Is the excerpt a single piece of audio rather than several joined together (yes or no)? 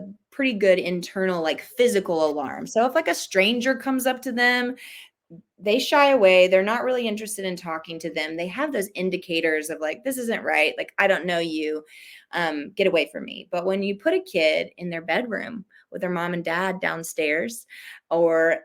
yes